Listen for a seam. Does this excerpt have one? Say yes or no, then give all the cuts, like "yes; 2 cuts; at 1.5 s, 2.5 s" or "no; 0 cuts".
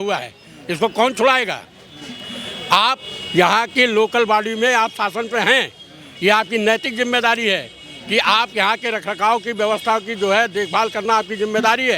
no; 0 cuts